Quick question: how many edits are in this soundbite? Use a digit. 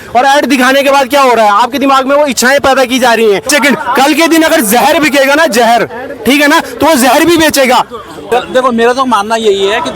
2